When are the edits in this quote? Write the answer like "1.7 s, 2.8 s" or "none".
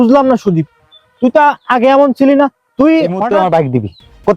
3.2 s